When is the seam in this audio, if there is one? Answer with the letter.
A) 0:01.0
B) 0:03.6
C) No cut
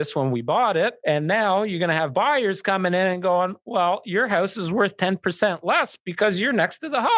A